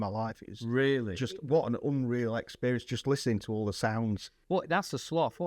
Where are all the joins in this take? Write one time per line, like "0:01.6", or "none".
0:04.3